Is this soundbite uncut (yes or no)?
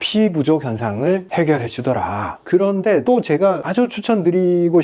no